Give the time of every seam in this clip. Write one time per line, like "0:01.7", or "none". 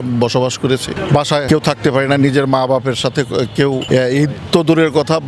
0:01.3
0:03.8